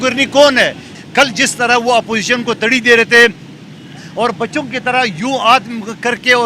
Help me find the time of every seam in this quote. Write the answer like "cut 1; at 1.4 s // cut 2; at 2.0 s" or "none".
cut 1; at 0.9 s